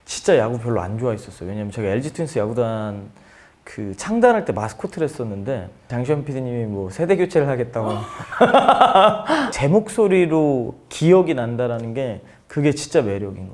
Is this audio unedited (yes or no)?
no